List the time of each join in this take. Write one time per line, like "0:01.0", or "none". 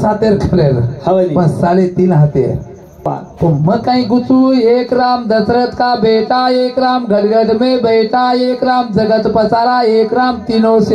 0:03.2